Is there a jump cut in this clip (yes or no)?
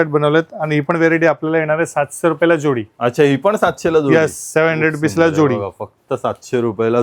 no